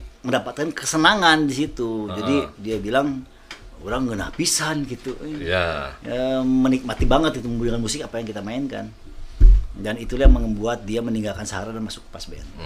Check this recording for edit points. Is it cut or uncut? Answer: uncut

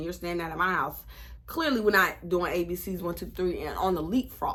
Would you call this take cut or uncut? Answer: uncut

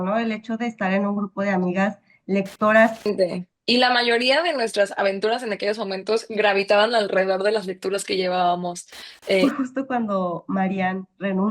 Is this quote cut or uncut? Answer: cut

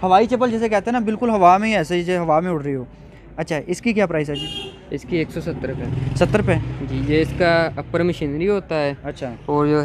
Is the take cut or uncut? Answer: uncut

